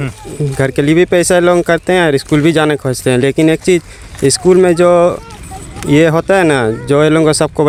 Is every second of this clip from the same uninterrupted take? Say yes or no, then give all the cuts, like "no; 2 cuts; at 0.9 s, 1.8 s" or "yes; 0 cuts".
yes; 0 cuts